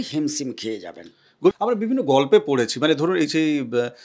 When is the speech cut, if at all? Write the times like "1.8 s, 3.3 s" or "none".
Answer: 1.5 s